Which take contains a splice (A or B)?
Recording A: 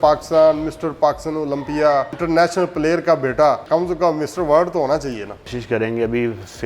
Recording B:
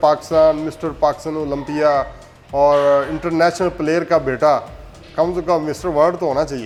A